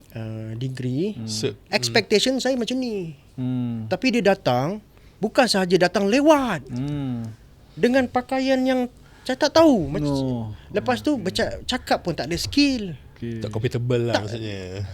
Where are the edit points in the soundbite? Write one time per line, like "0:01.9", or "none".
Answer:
none